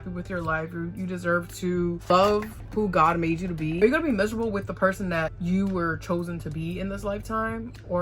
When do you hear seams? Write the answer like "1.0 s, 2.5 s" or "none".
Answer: 3.8 s